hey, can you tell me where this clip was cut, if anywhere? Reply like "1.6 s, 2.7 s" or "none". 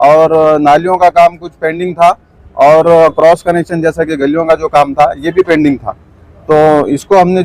none

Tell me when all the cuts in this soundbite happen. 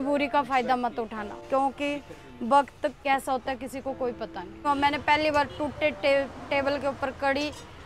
1.3 s, 3.0 s, 4.6 s

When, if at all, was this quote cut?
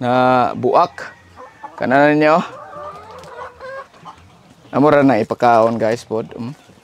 none

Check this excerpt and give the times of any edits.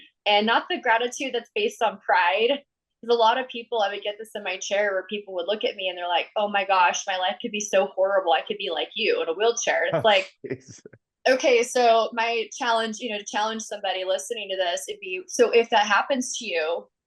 none

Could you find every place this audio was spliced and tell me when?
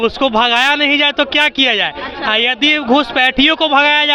none

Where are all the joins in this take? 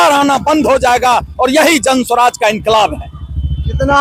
none

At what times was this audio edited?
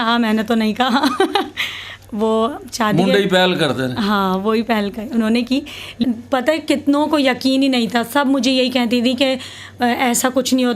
6.0 s

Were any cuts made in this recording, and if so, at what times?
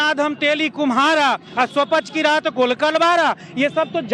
1.5 s

